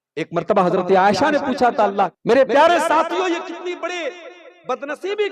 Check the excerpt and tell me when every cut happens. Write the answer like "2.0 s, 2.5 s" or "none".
2.2 s